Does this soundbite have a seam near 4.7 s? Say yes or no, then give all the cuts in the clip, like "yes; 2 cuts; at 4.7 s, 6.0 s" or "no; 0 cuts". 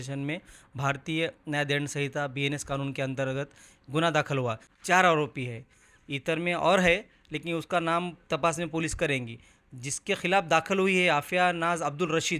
yes; 1 cut; at 4.7 s